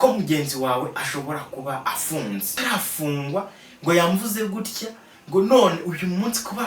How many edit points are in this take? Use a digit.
1